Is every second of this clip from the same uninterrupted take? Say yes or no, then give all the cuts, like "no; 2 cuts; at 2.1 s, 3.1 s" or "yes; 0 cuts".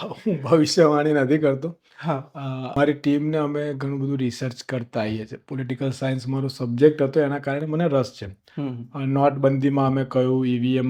no; 1 cut; at 2.7 s